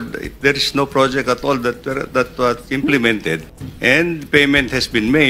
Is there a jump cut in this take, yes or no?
no